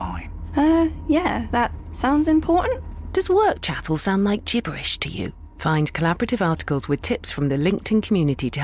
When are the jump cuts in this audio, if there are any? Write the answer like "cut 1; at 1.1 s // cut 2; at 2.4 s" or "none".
none